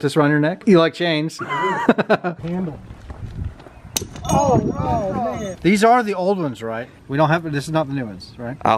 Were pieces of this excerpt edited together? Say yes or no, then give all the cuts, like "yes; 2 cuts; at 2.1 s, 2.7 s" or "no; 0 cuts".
yes; 3 cuts; at 2.4 s, 5.5 s, 6.9 s